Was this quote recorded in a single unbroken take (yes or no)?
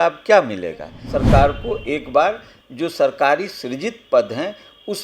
no